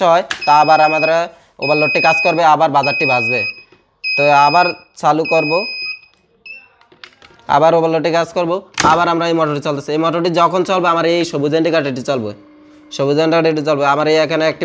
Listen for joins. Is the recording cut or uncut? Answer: uncut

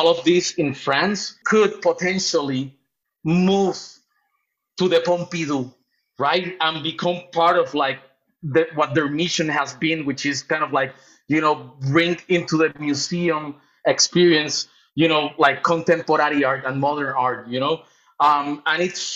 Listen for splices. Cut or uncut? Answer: cut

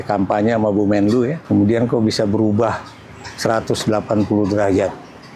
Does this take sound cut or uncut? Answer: cut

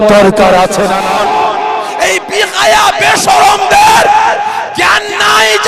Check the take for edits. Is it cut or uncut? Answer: cut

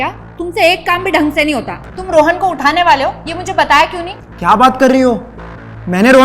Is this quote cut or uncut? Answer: cut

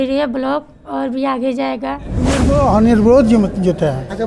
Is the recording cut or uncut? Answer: cut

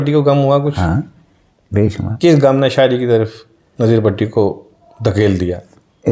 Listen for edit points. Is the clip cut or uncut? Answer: uncut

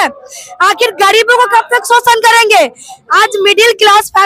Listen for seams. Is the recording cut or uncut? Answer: uncut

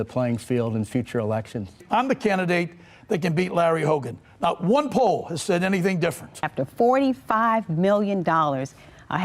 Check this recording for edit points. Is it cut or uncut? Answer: cut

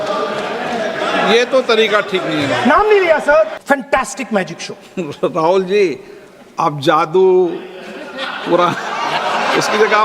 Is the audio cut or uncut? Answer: cut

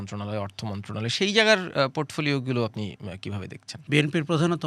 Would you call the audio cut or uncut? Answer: cut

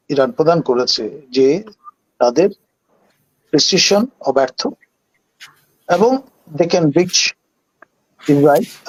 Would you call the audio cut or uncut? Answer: uncut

